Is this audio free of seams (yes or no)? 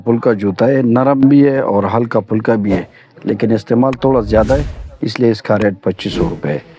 yes